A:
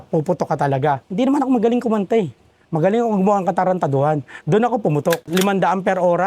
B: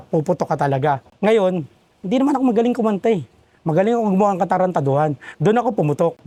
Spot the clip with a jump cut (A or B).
A